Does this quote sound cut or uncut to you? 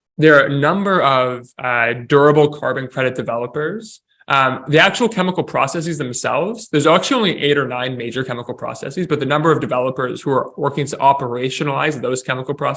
uncut